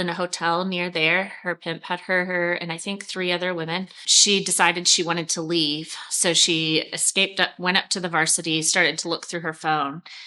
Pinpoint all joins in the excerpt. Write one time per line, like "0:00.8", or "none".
0:04.1